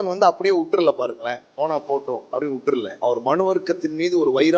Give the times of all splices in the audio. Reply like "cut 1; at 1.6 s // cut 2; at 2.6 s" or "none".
cut 1; at 2.9 s